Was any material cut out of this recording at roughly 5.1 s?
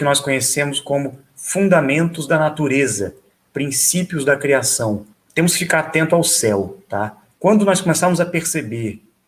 yes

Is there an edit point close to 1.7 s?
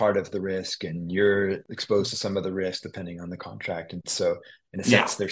yes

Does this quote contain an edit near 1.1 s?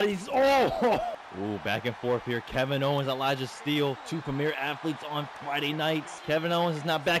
yes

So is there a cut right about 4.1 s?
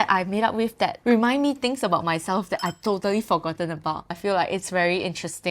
yes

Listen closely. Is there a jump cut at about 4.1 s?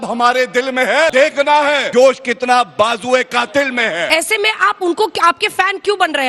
yes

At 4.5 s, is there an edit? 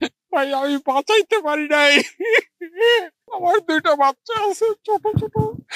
no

